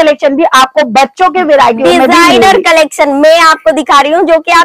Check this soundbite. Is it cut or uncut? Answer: uncut